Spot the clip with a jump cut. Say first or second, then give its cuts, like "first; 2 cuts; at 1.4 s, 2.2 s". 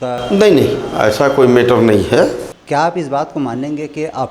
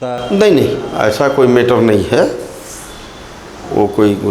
first; 1 cut; at 2.5 s